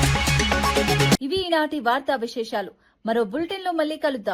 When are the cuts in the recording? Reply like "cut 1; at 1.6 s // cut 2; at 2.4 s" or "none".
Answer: none